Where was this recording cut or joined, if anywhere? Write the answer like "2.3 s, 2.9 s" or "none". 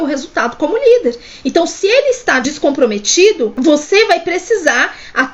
2.4 s, 3.5 s